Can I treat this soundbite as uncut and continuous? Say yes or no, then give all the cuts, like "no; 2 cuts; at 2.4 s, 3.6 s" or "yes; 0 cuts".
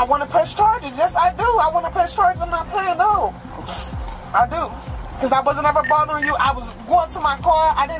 yes; 0 cuts